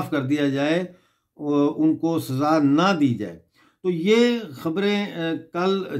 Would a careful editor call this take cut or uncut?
uncut